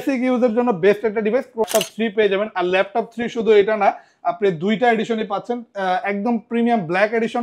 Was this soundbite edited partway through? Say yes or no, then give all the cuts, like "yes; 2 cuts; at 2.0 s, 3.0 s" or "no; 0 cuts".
yes; 1 cut; at 1.6 s